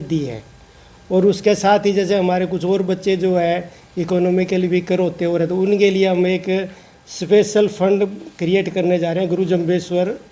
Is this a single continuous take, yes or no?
yes